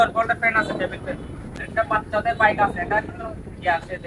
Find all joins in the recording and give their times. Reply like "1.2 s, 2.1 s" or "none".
1.6 s